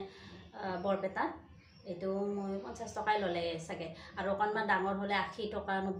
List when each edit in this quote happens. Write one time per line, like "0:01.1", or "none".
none